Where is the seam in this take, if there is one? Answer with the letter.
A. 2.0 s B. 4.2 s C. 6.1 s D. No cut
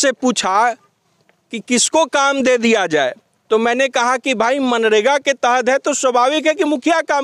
D